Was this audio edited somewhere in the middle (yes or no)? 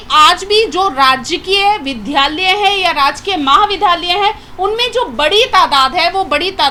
no